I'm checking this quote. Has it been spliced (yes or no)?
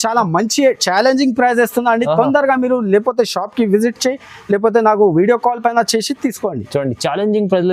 no